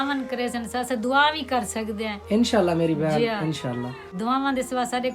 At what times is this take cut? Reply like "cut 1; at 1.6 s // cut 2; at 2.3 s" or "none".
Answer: cut 1; at 4.1 s